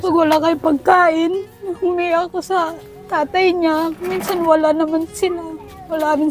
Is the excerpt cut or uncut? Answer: uncut